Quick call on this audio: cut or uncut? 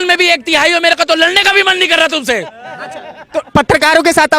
uncut